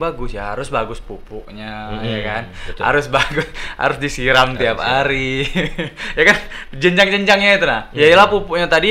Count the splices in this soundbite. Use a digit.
0